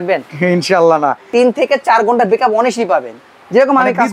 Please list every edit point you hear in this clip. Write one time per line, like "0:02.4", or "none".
0:01.2